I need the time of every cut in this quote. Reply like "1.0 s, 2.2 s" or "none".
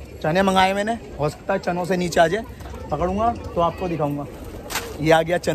none